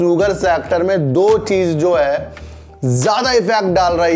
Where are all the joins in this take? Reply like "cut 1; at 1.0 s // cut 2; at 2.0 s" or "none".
none